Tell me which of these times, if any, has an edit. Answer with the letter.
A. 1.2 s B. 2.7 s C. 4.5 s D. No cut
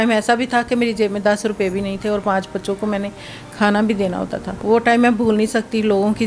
C